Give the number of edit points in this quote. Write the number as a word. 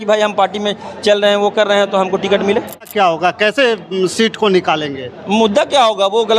one